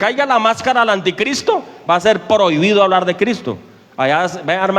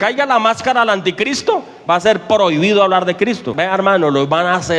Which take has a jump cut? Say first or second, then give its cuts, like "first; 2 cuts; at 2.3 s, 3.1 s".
second; 1 cut; at 3.5 s